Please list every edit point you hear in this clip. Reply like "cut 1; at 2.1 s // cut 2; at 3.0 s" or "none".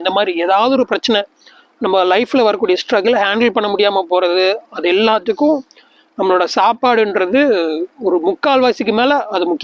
none